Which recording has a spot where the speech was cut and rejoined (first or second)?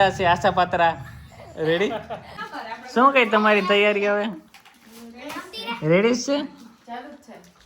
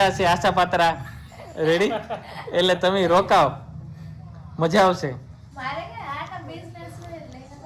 first